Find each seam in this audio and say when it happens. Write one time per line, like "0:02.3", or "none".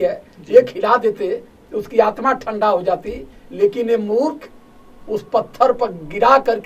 none